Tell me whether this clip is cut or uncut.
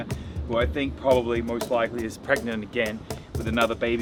uncut